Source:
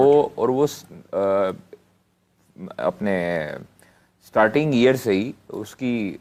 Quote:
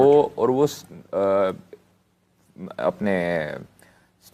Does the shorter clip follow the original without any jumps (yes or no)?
yes